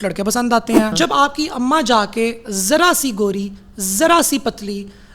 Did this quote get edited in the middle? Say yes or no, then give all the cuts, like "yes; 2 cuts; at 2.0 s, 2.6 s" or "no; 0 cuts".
yes; 1 cut; at 0.9 s